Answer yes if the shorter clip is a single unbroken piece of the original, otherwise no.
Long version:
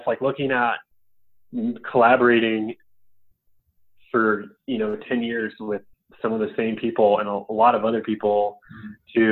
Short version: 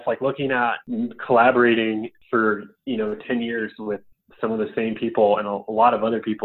no